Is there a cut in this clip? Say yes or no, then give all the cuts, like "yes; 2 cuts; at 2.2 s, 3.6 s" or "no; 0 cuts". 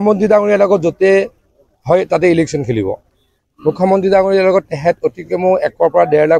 yes; 1 cut; at 4.7 s